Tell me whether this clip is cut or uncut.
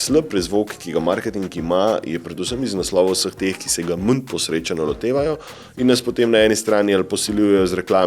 uncut